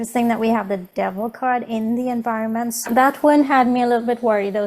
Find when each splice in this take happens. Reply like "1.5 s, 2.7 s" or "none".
2.9 s